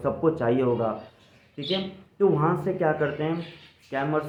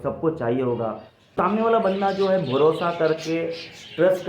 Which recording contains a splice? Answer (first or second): second